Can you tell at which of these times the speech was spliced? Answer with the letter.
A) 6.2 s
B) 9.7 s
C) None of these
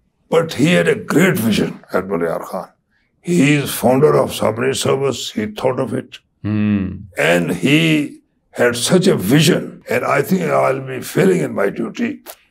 B